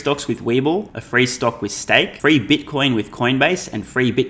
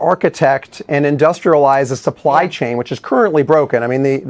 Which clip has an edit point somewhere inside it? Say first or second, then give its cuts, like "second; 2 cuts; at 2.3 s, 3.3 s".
first; 2 cuts; at 1.0 s, 2.1 s